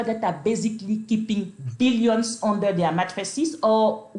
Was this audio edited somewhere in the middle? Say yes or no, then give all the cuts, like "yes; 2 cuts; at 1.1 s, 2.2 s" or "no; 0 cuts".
no; 0 cuts